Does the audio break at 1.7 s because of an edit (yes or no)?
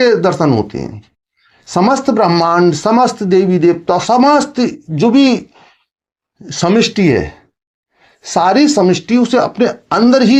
no